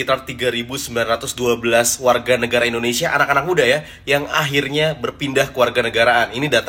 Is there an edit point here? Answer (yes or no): no